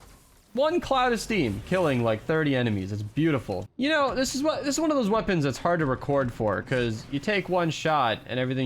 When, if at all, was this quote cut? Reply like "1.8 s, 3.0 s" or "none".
3.7 s